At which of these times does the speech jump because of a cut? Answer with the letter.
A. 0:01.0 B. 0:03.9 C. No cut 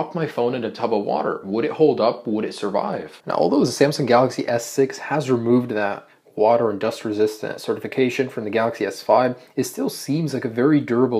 A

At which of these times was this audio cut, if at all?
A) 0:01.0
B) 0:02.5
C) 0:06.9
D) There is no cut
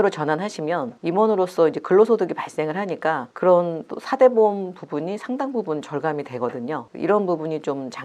D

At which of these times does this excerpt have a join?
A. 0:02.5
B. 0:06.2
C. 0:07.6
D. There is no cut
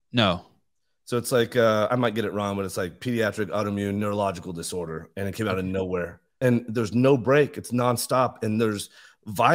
B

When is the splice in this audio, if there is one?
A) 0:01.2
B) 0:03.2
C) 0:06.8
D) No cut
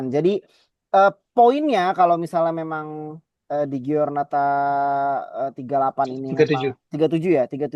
D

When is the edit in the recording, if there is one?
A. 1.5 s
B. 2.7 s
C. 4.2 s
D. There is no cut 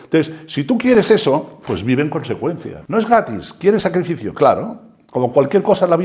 B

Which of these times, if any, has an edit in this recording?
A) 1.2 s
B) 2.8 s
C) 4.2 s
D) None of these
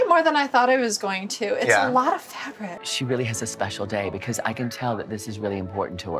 B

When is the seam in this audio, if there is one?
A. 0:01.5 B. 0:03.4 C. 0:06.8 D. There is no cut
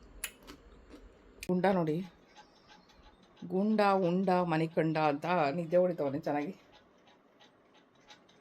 A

